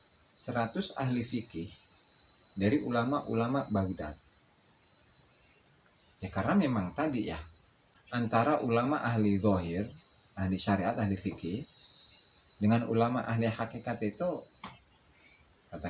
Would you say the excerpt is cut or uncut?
cut